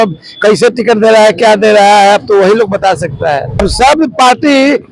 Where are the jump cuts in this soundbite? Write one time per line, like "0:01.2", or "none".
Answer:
0:03.6